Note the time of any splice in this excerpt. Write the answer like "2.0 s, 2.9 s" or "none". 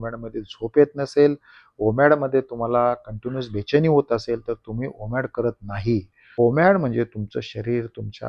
6.2 s